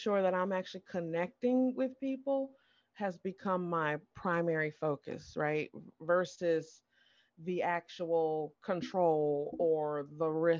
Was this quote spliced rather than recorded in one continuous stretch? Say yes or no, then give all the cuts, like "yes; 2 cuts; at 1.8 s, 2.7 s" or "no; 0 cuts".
no; 0 cuts